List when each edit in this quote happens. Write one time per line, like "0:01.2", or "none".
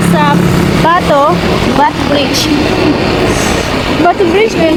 none